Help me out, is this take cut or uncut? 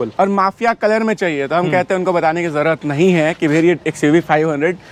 uncut